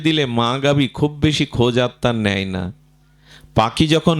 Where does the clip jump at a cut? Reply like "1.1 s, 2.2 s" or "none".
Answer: none